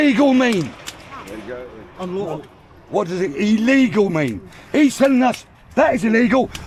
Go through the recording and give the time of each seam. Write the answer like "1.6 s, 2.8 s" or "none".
none